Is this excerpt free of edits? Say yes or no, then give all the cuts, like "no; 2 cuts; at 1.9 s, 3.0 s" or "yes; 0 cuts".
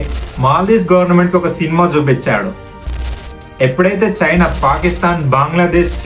no; 1 cut; at 3.1 s